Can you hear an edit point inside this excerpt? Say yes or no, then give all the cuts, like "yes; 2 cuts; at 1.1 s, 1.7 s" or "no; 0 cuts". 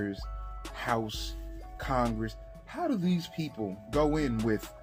no; 0 cuts